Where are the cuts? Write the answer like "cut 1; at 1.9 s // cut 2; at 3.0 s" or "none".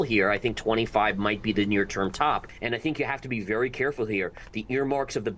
cut 1; at 2.5 s